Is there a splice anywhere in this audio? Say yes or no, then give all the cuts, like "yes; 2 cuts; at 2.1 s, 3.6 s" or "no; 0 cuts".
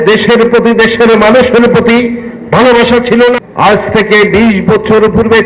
yes; 1 cut; at 3.4 s